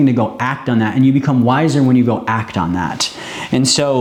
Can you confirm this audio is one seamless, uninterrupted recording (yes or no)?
yes